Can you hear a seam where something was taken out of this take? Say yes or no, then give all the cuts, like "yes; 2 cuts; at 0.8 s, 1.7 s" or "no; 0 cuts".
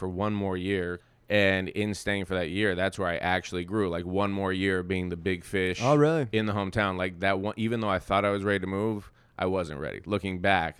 yes; 1 cut; at 1.0 s